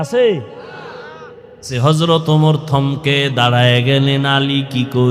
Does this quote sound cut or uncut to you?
cut